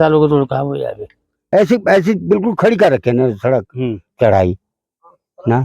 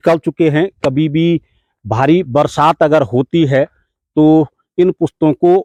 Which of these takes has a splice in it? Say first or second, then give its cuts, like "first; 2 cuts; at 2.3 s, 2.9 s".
first; 1 cut; at 1.4 s